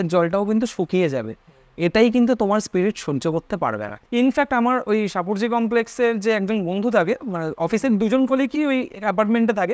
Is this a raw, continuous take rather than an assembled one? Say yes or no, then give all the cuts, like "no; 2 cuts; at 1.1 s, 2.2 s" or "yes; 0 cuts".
no; 1 cut; at 3.9 s